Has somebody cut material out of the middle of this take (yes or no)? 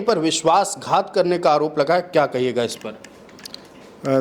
no